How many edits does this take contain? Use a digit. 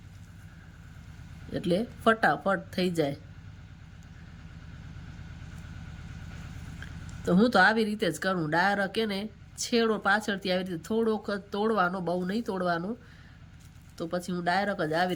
0